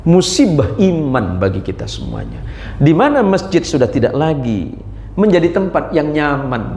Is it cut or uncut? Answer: uncut